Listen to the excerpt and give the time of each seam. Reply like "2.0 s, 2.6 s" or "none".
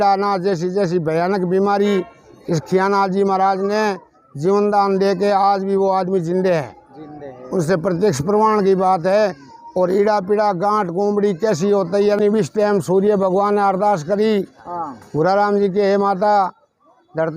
12.2 s